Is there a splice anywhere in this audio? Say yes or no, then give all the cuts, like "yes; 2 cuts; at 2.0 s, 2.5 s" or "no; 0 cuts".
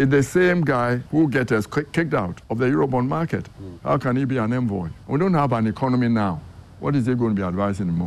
yes; 3 cuts; at 1.0 s, 2.4 s, 4.9 s